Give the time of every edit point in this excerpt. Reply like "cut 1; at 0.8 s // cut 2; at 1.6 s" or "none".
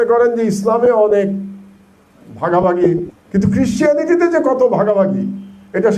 cut 1; at 3.2 s